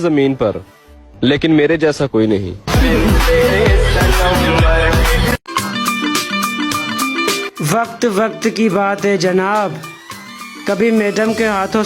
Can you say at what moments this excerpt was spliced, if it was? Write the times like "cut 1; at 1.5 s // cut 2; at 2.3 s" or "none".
cut 1; at 5.4 s